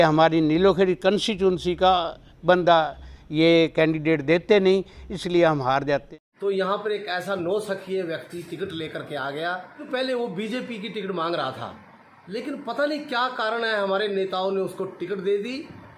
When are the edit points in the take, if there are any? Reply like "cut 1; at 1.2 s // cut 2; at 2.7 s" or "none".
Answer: cut 1; at 6.2 s // cut 2; at 9.9 s